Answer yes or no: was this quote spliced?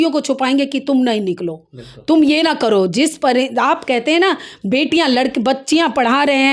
no